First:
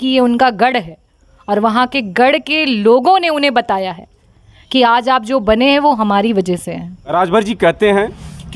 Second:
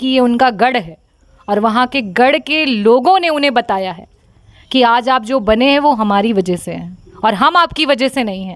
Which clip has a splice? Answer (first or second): first